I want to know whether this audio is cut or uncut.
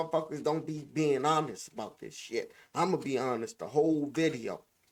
uncut